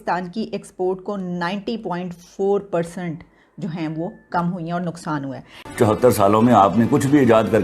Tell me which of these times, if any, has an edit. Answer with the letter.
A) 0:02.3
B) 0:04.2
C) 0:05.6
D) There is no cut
C